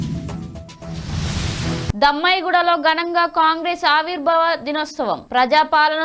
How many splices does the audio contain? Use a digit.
1